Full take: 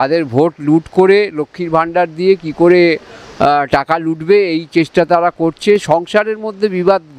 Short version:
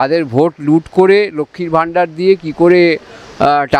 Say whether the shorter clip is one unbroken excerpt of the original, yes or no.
yes